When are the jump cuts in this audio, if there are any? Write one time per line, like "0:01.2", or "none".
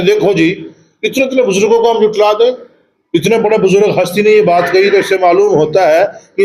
none